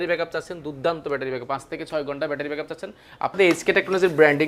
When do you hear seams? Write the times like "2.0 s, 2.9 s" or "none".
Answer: 3.4 s